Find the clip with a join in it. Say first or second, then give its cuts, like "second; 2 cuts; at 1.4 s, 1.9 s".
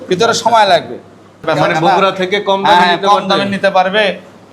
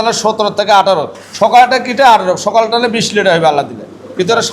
first; 1 cut; at 1.4 s